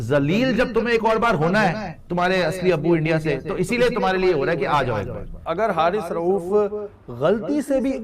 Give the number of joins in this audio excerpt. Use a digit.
1